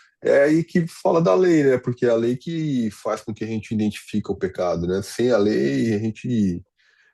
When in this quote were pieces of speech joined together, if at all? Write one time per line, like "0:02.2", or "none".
none

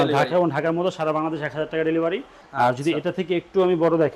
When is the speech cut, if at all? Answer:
0:02.4

